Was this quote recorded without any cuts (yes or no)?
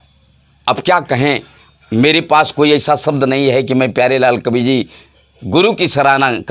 yes